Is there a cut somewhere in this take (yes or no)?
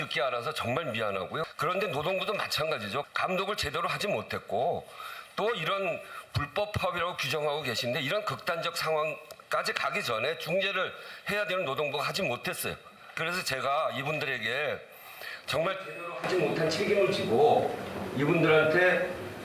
yes